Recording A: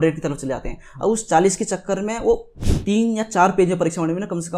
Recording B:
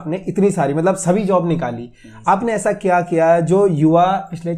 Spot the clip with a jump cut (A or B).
A